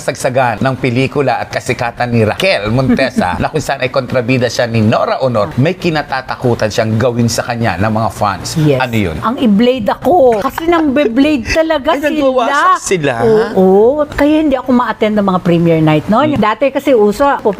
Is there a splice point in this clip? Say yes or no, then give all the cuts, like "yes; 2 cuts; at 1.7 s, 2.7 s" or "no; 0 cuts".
no; 0 cuts